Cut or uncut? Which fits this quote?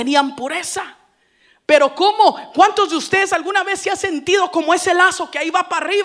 uncut